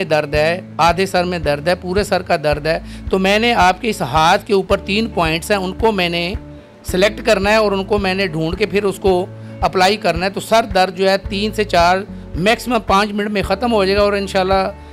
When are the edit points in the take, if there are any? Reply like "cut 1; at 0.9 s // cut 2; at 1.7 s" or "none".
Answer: none